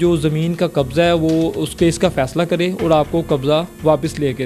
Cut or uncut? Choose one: uncut